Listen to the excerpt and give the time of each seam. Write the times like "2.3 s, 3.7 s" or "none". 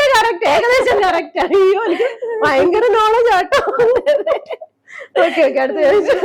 none